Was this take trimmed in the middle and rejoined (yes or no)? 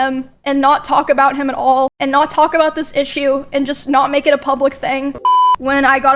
yes